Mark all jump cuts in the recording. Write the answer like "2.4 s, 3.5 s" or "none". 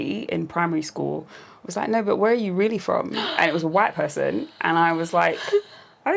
none

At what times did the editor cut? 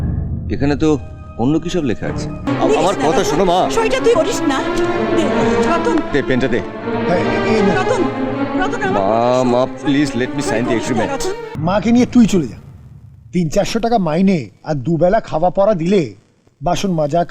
2.4 s, 11.5 s

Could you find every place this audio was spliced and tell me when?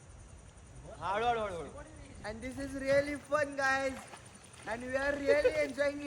2.3 s

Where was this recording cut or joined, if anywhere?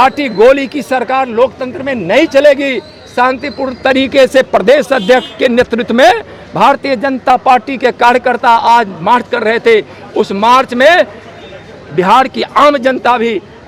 none

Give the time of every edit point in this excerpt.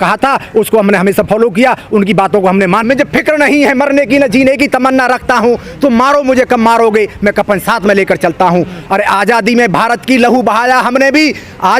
2.8 s

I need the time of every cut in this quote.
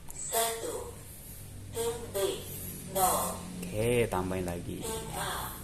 none

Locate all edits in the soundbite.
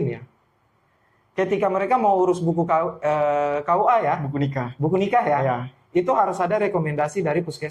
none

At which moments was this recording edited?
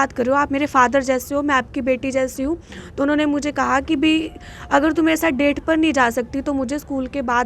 none

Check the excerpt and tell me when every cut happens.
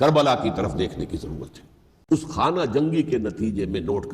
2.1 s

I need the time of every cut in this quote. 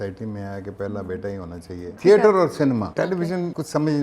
2.0 s, 3.1 s

